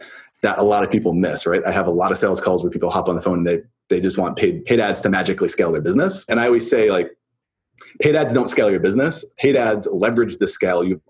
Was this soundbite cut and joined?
yes; 1 cut; at 6.3 s

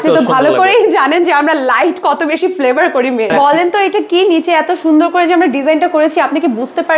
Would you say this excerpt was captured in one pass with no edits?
no; 1 cut; at 3.3 s

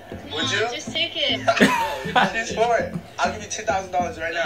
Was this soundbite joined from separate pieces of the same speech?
yes; 1 cut; at 1.3 s

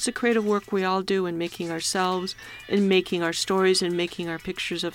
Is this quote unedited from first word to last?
yes; 0 cuts

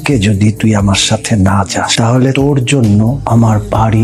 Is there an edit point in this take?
no; 0 cuts

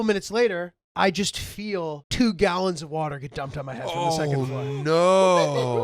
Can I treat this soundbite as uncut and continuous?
no; 1 cut; at 2.0 s

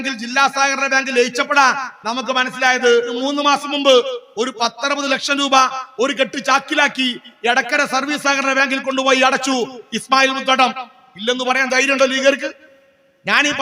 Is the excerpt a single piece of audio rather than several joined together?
no; 1 cut; at 3.1 s

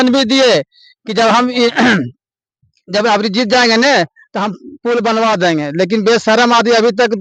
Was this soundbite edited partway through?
no; 0 cuts

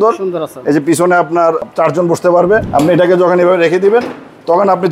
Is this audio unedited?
no; 2 cuts; at 1.7 s, 2.7 s

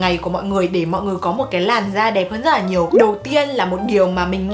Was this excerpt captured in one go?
yes; 0 cuts

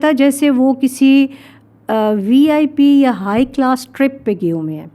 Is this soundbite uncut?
yes; 0 cuts

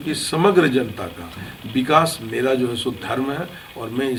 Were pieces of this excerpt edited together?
no; 0 cuts

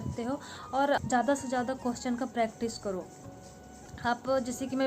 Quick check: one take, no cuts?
no; 1 cut; at 1.0 s

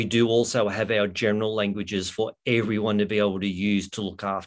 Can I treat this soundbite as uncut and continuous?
yes; 0 cuts

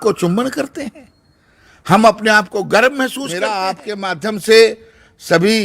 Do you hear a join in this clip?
yes; 1 cut; at 3.7 s

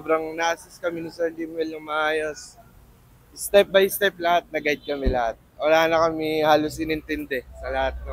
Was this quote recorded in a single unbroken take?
yes; 0 cuts

